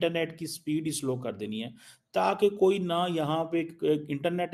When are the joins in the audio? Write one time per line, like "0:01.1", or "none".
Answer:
none